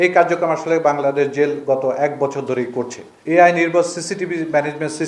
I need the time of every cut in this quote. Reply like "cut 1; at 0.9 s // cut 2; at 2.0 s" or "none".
cut 1; at 3.1 s